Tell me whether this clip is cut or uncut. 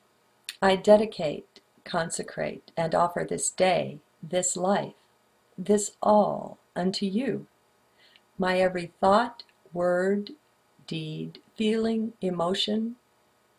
cut